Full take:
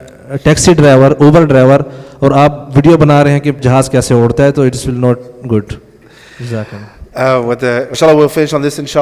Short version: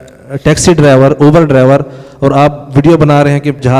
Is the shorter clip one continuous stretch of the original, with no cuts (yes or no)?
yes